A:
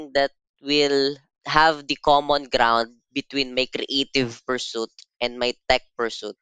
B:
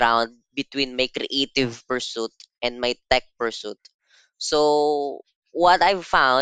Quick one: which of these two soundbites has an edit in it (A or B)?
A